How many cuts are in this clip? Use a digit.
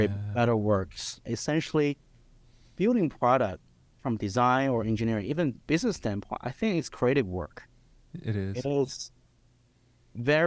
1